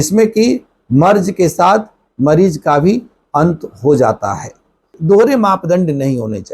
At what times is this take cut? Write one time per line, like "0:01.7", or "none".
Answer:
0:05.0